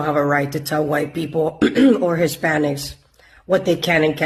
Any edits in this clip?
no; 0 cuts

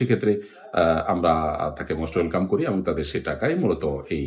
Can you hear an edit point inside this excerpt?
no; 0 cuts

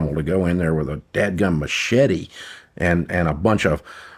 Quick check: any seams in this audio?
no; 0 cuts

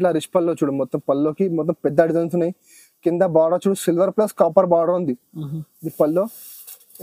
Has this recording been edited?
no; 0 cuts

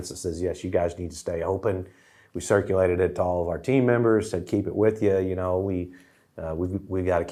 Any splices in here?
no; 0 cuts

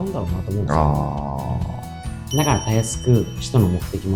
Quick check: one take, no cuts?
no; 1 cut; at 2.1 s

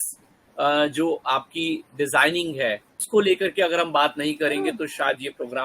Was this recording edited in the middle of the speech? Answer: yes; 1 cut; at 3.0 s

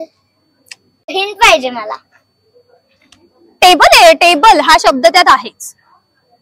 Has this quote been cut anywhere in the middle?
yes; 1 cut; at 1.1 s

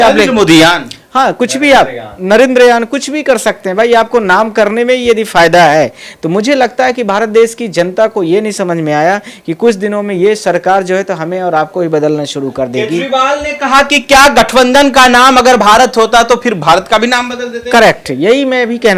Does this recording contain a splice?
no; 0 cuts

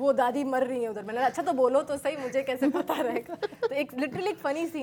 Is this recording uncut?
yes; 0 cuts

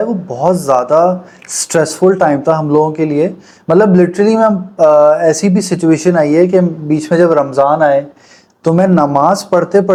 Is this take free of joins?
yes; 0 cuts

